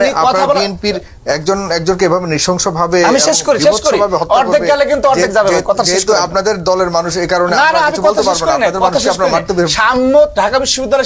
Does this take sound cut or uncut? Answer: uncut